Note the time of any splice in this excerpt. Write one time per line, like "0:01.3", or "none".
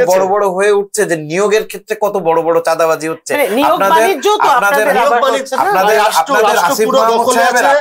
none